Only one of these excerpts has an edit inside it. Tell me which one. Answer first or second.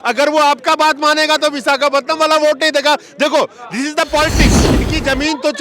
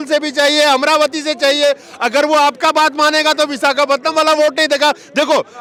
first